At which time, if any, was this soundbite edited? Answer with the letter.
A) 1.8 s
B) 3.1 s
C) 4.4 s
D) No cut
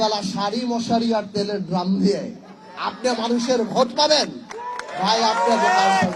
D